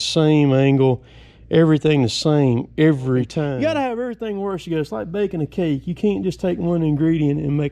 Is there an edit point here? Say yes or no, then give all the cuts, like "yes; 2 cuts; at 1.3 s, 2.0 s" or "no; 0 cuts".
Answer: yes; 1 cut; at 3.5 s